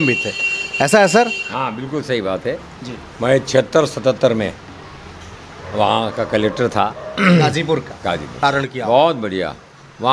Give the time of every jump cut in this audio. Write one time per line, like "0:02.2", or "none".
0:08.4